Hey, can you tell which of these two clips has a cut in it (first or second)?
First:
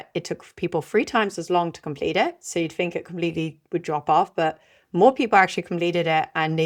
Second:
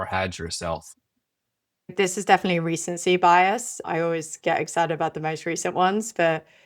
second